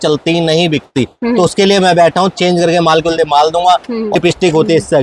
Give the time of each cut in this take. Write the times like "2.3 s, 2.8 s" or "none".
4.1 s